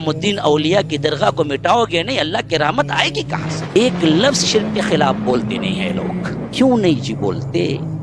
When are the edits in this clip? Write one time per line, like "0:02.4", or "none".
0:03.6